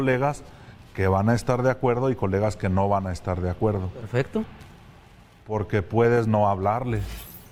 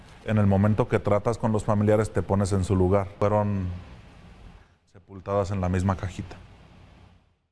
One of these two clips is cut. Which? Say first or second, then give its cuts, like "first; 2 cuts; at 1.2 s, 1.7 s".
second; 1 cut; at 3.2 s